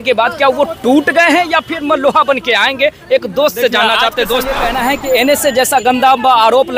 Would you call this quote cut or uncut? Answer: cut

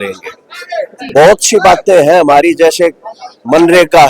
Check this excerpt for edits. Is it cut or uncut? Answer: uncut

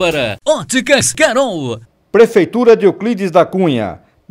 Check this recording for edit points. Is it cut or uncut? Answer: uncut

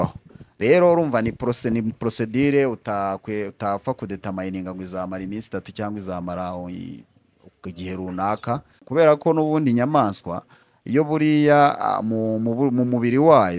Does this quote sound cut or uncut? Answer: cut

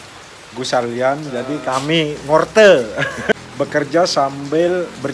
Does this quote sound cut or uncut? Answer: cut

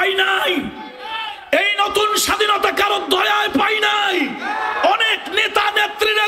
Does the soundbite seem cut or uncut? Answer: uncut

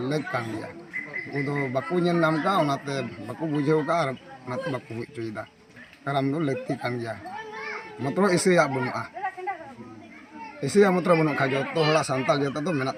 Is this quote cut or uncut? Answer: uncut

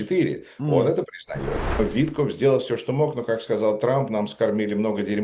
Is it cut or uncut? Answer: cut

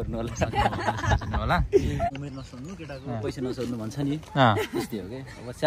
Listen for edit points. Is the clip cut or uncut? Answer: cut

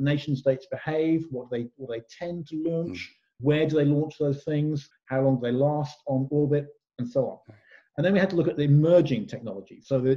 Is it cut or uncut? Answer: cut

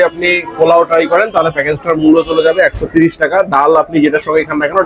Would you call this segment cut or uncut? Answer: uncut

